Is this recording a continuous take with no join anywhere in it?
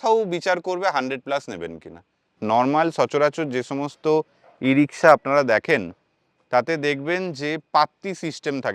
no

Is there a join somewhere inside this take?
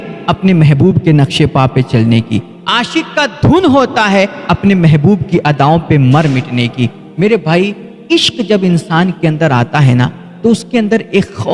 no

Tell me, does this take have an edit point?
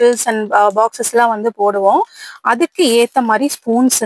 no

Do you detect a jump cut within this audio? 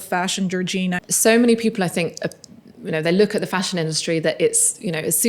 yes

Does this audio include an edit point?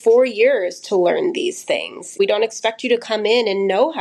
yes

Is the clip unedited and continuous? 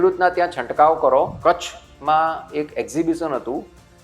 no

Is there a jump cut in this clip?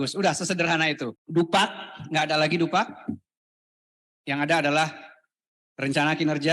yes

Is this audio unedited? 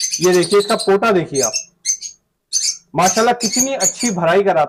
yes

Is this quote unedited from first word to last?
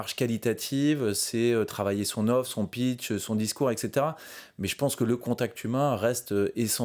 yes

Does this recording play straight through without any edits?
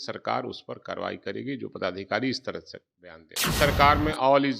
no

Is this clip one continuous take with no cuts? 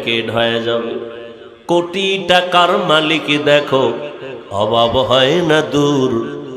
yes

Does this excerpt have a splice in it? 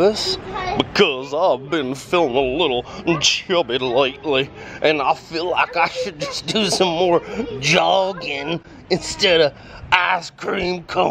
no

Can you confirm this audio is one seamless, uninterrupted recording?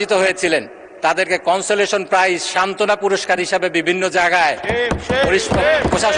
yes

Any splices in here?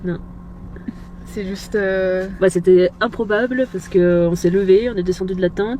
no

